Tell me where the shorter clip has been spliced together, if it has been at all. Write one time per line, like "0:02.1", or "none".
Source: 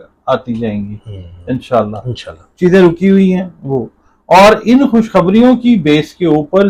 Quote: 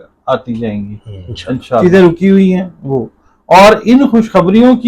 0:01.8